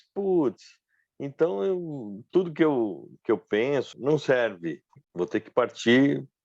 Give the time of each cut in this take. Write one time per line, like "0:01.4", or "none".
0:05.0